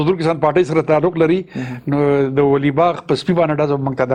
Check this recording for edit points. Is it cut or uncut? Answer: uncut